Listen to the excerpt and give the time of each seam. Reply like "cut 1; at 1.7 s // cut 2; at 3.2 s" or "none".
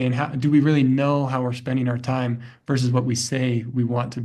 none